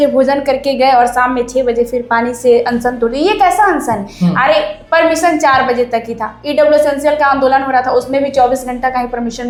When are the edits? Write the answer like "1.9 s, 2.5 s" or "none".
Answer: none